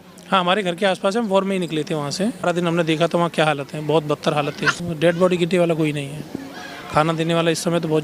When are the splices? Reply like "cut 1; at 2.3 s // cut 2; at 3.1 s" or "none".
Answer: cut 1; at 2.5 s // cut 2; at 4.8 s